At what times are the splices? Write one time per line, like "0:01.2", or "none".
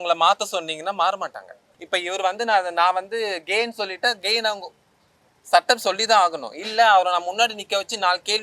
0:01.7

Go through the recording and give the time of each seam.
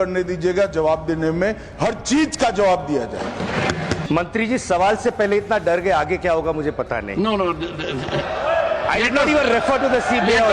0:04.0

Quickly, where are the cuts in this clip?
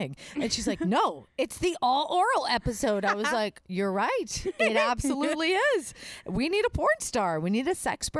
none

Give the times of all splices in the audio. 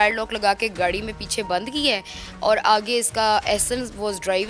none

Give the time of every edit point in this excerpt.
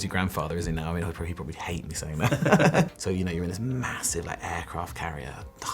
0:02.9

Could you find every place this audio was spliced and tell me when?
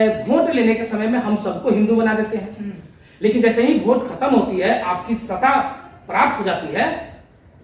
none

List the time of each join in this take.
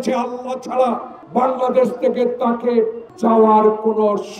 0:01.1
0:03.0

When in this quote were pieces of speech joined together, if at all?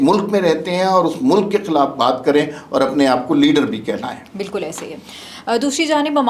none

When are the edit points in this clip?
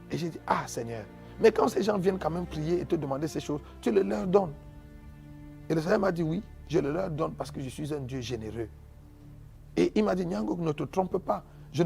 none

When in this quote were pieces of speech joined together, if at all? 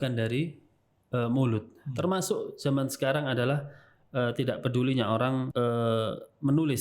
0:05.5

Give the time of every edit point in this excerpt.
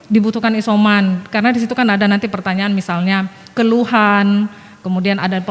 none

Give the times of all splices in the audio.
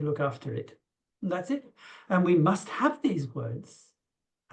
none

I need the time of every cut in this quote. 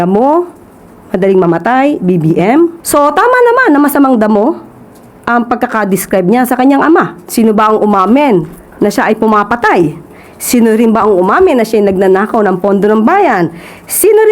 0:02.8
0:07.2

